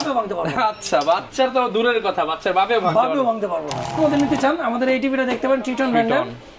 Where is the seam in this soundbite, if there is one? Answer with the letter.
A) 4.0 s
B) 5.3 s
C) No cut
A